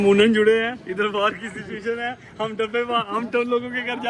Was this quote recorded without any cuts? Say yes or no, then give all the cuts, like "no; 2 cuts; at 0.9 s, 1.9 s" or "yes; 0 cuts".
yes; 0 cuts